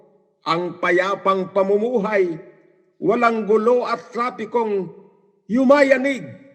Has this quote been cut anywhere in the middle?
no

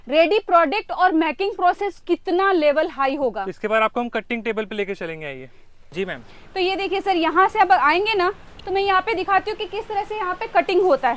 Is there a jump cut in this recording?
no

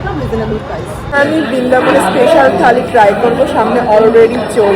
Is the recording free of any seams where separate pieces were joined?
no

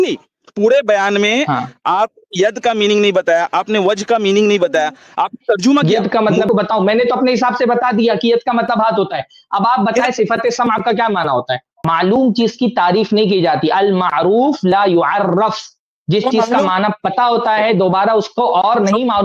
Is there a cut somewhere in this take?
yes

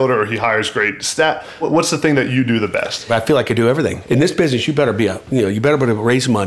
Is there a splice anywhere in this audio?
yes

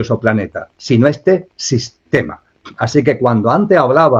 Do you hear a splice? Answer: no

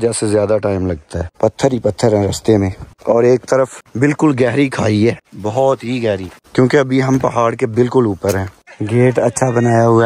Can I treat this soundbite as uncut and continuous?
yes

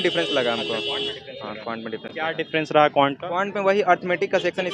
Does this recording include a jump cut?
no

